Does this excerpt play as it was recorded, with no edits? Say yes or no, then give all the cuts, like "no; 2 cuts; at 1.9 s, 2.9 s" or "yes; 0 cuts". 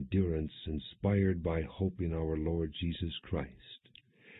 no; 1 cut; at 2.5 s